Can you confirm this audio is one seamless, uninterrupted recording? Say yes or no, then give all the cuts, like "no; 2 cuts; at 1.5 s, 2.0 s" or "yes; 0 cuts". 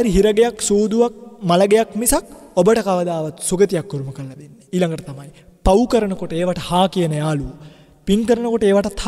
no; 2 cuts; at 1.3 s, 2.4 s